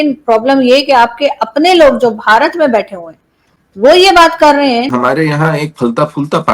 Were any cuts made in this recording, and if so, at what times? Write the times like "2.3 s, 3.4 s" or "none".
4.9 s